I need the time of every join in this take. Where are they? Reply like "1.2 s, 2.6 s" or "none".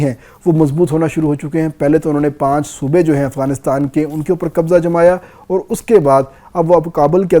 none